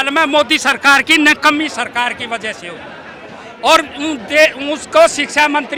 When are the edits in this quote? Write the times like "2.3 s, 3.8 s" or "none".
none

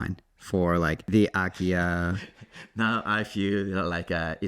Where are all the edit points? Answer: 1.0 s

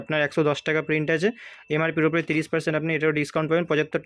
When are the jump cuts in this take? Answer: none

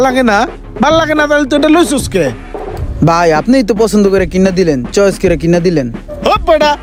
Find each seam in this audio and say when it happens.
none

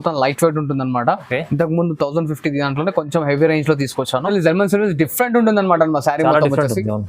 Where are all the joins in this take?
4.3 s

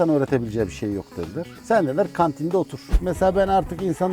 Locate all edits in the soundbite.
1.5 s, 2.9 s

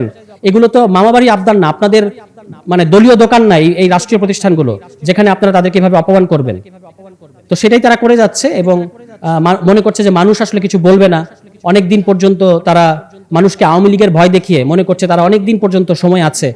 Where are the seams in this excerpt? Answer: none

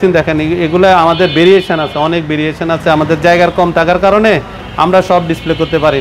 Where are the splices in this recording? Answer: none

